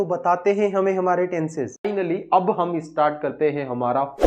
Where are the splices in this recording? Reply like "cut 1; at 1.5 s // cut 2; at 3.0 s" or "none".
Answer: cut 1; at 1.9 s